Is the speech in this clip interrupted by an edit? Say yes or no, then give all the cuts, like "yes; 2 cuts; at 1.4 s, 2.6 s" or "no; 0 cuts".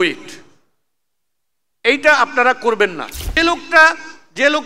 yes; 1 cut; at 3.4 s